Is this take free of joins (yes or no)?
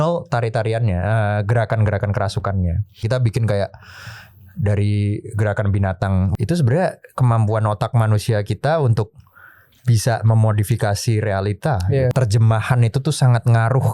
no